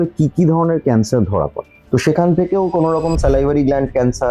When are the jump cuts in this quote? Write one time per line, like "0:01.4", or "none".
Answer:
0:01.8